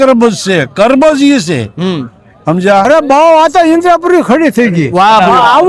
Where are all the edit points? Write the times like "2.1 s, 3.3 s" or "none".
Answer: 2.9 s